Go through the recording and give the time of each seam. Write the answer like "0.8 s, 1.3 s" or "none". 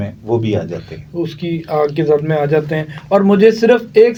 none